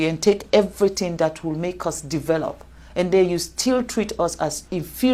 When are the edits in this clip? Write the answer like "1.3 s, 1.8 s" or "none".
none